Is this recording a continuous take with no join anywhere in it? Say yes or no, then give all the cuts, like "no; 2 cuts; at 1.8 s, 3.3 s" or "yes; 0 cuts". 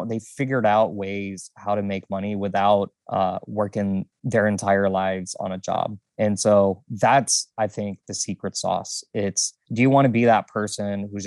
yes; 0 cuts